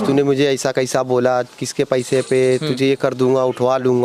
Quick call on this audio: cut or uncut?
uncut